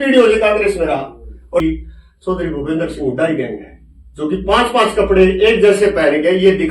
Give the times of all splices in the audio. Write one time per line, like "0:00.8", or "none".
0:01.6